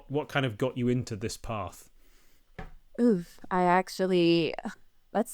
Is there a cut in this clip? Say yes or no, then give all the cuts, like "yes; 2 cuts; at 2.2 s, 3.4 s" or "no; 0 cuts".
no; 0 cuts